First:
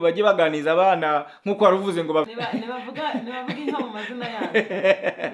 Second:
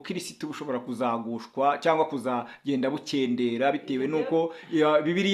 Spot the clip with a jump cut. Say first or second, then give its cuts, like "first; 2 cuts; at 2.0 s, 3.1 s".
first; 1 cut; at 2.3 s